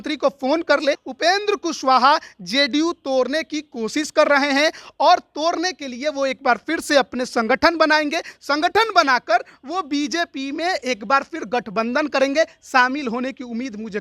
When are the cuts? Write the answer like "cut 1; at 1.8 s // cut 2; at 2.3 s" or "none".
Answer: cut 1; at 1.1 s